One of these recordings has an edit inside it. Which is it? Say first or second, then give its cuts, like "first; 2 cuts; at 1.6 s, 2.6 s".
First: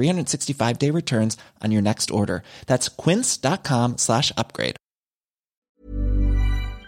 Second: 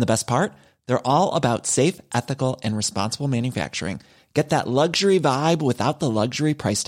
first; 1 cut; at 5.6 s